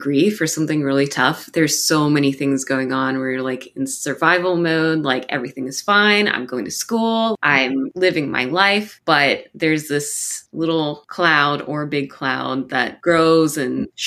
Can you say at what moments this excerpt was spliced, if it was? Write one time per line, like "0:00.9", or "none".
none